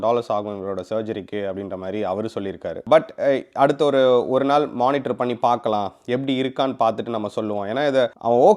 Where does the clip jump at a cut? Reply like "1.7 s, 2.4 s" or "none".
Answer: none